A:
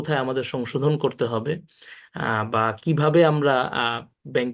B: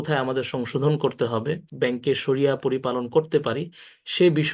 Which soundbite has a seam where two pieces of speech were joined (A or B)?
B